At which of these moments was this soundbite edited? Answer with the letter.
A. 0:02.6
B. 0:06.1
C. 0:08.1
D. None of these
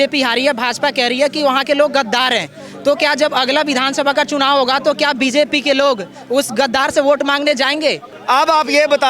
C